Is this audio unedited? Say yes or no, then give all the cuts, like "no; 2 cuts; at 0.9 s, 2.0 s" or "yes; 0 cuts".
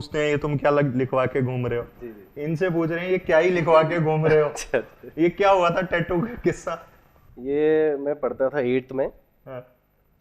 yes; 0 cuts